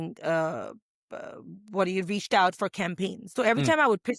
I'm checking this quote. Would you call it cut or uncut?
cut